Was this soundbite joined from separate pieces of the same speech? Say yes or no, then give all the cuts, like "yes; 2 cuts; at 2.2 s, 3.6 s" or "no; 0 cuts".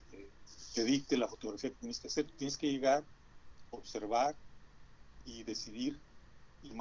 no; 0 cuts